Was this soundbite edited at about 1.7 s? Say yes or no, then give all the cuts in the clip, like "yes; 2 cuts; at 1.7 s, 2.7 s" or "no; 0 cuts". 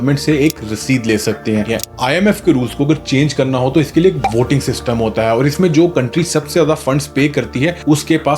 yes; 1 cut; at 1.7 s